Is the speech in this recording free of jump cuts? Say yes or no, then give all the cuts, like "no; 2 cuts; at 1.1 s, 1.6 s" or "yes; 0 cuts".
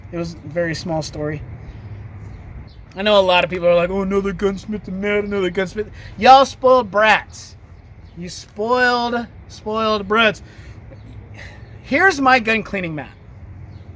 no; 1 cut; at 2.7 s